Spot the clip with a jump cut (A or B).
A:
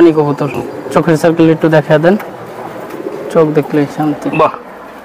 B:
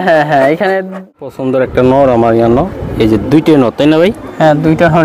B